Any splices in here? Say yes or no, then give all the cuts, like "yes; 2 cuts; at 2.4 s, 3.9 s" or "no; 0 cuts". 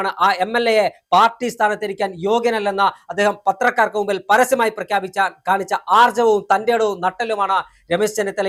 no; 0 cuts